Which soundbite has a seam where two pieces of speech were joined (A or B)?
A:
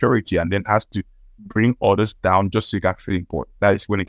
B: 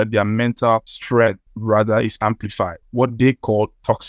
B